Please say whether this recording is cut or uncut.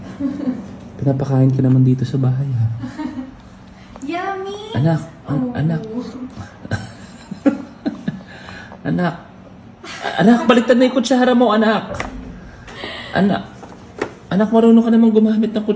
uncut